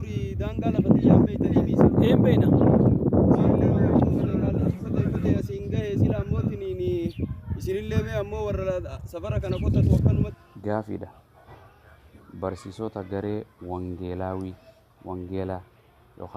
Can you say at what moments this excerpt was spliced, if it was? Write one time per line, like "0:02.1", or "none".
0:10.3